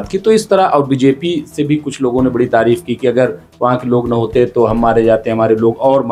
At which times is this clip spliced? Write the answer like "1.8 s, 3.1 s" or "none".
none